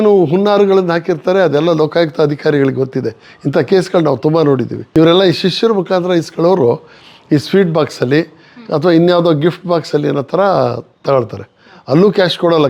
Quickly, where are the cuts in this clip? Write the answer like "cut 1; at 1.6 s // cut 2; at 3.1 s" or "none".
cut 1; at 4.8 s